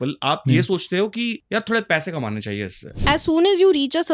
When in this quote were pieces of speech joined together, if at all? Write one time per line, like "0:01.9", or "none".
0:01.4
0:02.9